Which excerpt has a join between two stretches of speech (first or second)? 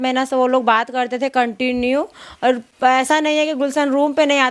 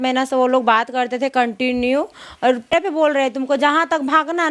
second